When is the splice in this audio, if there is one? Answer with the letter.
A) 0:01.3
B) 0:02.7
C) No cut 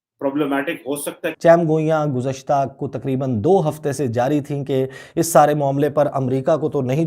A